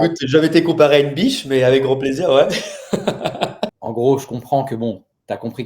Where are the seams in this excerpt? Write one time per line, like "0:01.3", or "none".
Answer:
0:03.8